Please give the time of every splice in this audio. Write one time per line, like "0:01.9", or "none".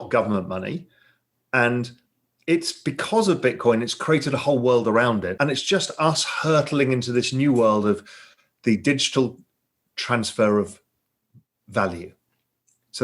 0:05.3